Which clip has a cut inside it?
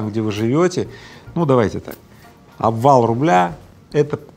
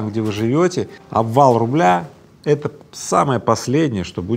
second; 1 cut; at 0.9 s

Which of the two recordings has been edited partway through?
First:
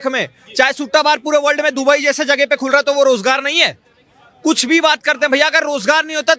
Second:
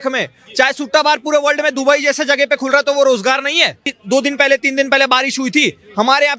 second; 1 cut; at 4.0 s

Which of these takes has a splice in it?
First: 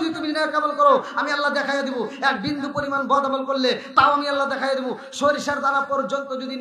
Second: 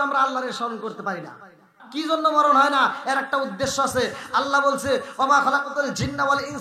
second; 1 cut; at 1.9 s

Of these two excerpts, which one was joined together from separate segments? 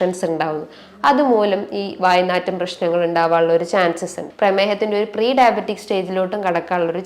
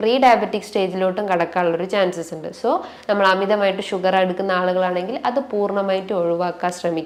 first; 1 cut; at 4.2 s

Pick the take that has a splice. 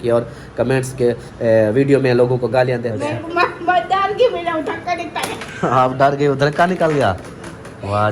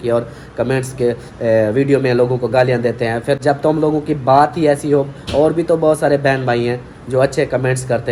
first; 1 cut; at 2.9 s

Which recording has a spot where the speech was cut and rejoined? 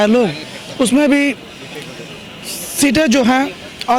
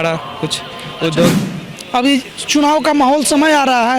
second; 1 cut; at 1.4 s

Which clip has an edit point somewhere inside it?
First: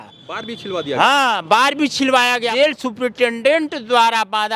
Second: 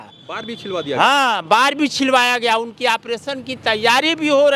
first; 1 cut; at 2.5 s

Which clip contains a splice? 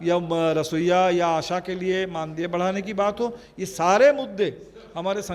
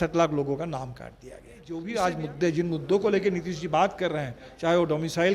second; 1 cut; at 1.8 s

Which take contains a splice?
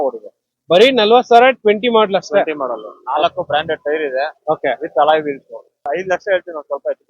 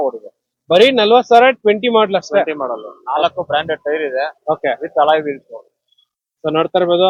first; 1 cut; at 5.9 s

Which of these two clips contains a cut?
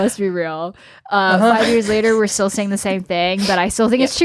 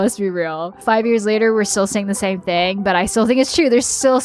second; 1 cut; at 0.9 s

